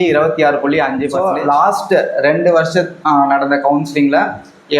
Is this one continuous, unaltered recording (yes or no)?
no